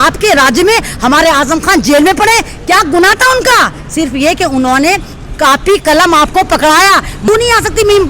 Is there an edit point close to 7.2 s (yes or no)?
yes